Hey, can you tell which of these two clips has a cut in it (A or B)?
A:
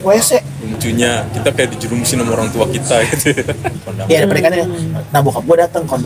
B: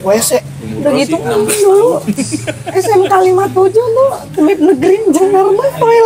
A